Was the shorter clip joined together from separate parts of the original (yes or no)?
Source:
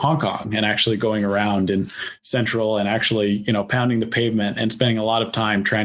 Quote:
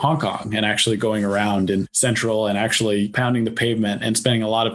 yes